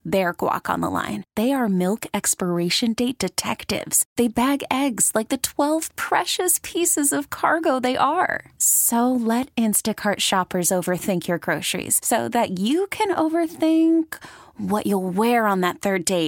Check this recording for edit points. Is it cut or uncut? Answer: uncut